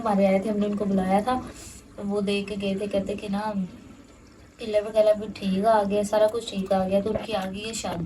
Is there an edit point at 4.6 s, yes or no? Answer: no